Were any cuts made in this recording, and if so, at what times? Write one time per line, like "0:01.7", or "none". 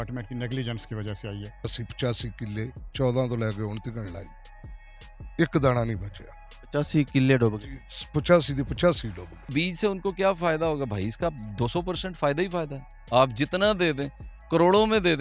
0:01.8
0:09.5